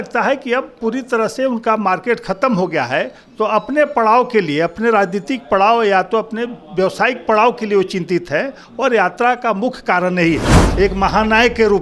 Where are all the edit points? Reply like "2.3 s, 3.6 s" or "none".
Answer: 10.6 s